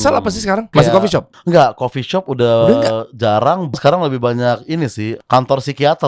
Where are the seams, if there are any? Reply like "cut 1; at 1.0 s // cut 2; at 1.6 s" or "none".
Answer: cut 1; at 1.0 s // cut 2; at 3.7 s // cut 3; at 5.1 s